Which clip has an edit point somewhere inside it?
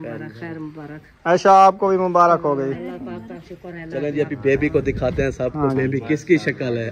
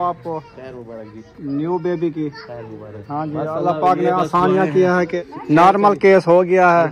second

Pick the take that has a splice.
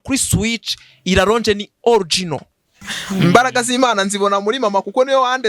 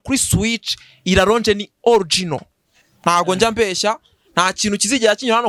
first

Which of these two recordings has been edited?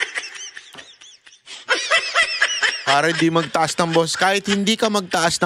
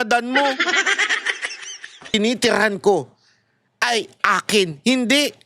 second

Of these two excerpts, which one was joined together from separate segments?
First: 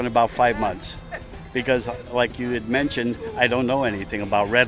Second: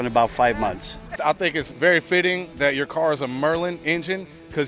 second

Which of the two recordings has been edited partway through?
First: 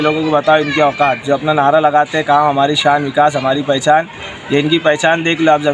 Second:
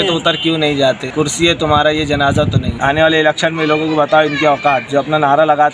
second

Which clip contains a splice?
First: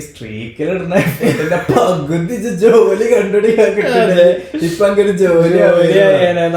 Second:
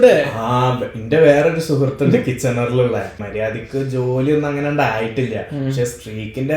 second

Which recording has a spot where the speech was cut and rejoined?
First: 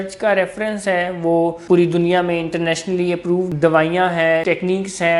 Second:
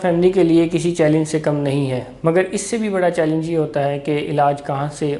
first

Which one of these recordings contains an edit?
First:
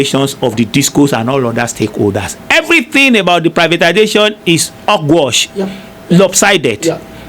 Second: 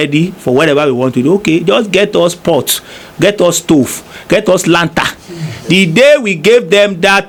first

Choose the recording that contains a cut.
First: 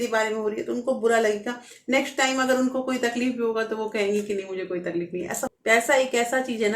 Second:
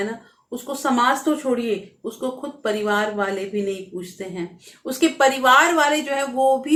first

